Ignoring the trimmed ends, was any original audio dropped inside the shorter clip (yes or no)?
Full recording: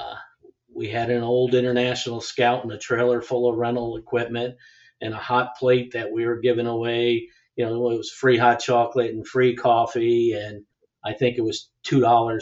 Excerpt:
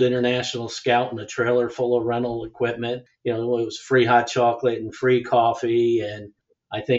yes